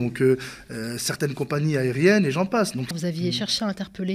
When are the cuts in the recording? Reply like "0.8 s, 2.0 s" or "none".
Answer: 2.9 s